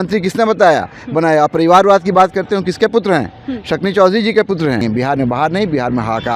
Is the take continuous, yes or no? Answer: no